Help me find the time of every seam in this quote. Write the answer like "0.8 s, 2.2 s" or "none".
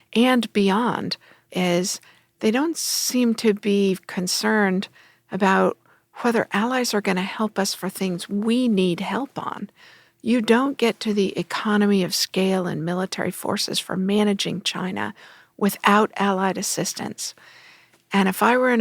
1.5 s